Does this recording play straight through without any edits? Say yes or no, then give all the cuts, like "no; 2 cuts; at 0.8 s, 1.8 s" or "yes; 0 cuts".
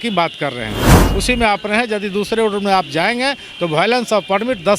no; 1 cut; at 1.0 s